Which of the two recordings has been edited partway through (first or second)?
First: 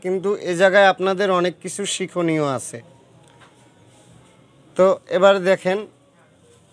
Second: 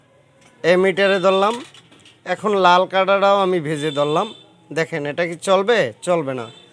first